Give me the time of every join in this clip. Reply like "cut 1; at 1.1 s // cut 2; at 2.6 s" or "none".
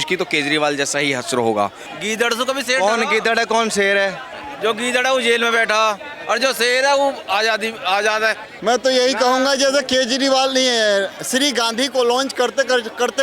cut 1; at 1.9 s // cut 2; at 8.5 s